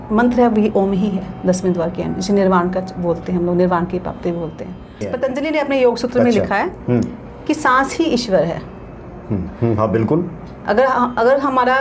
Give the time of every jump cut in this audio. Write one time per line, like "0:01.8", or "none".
0:05.1

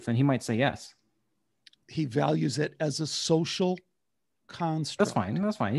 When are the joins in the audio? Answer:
0:01.8

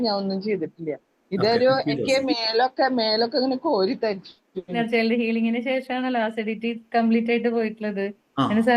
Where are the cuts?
0:04.8

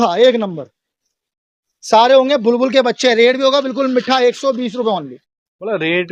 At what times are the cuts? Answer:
none

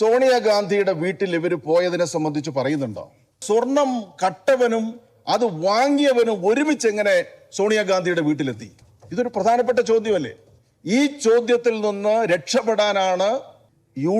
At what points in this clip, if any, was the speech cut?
0:03.4

